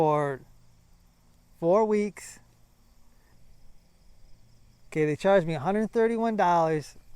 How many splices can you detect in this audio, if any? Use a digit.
1